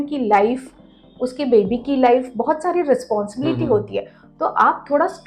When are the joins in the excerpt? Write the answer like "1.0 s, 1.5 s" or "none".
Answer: none